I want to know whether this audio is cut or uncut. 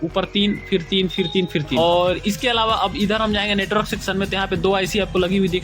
cut